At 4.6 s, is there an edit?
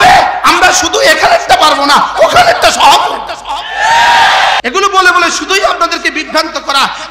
yes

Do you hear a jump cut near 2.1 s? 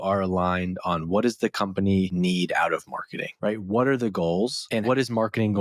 yes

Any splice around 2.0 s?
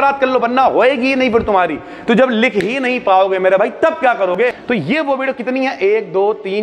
no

